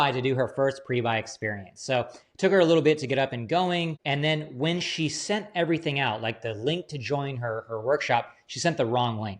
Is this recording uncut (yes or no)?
no